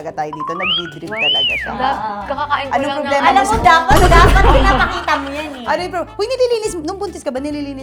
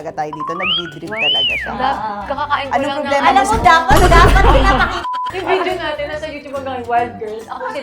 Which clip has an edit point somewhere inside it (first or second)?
second